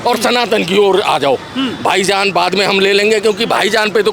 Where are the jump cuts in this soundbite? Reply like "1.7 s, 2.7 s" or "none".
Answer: none